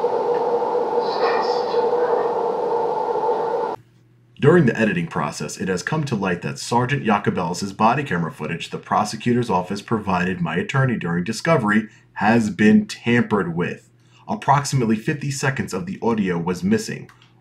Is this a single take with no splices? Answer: no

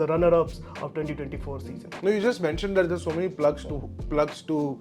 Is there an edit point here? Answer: no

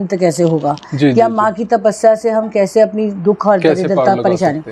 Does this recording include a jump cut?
no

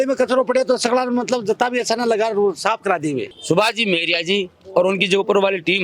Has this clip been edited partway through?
yes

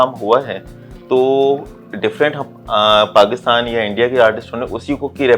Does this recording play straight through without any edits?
yes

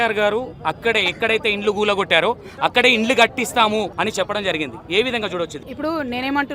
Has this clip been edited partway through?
yes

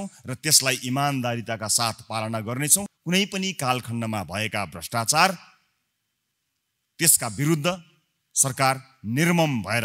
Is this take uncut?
no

